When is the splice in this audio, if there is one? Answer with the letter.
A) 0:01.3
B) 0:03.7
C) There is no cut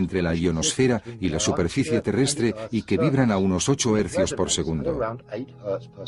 A